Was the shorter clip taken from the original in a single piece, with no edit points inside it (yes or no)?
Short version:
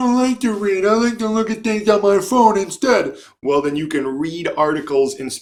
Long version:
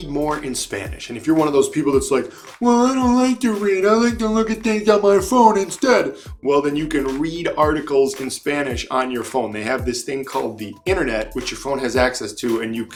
yes